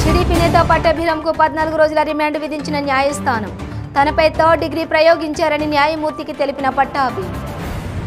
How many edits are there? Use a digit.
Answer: 0